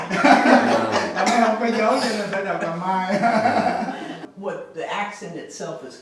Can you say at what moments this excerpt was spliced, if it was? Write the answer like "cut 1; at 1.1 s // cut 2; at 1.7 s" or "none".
cut 1; at 4.2 s